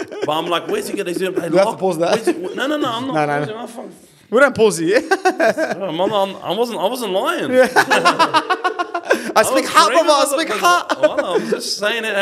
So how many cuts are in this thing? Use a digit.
0